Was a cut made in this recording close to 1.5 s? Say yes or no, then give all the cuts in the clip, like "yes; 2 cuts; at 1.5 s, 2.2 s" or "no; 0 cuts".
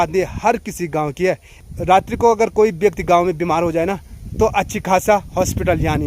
yes; 1 cut; at 1.5 s